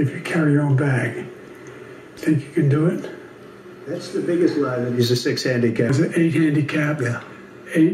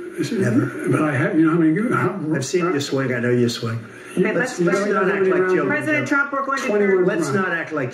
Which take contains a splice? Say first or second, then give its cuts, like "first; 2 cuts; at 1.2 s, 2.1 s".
first; 1 cut; at 5.9 s